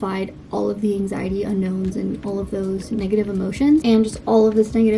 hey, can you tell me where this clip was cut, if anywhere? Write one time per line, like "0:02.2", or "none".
0:03.8